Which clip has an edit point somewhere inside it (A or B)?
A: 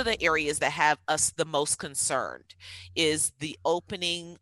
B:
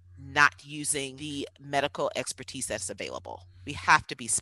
B